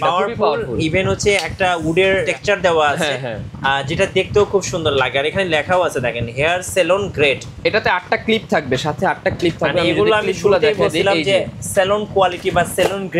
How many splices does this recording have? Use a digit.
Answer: 2